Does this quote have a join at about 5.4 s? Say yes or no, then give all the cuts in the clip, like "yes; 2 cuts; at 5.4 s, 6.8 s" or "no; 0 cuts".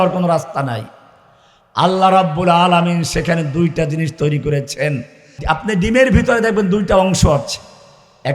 yes; 1 cut; at 5.4 s